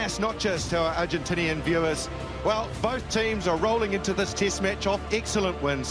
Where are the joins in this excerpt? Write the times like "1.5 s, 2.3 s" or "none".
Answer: none